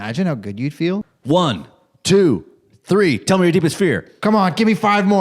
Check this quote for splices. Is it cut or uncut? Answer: cut